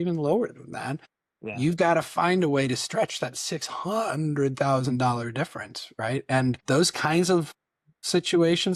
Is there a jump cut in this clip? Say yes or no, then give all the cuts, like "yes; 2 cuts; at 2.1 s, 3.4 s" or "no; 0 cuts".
no; 0 cuts